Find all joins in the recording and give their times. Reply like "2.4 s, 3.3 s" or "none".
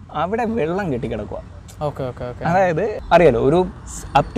3.0 s